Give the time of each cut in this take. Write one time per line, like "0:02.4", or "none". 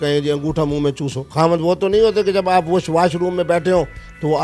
none